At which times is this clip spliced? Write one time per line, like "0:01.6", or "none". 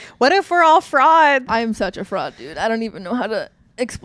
0:01.5